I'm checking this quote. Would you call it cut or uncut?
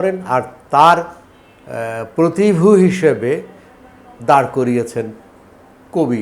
uncut